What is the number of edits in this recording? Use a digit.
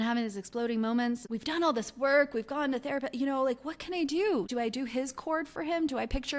2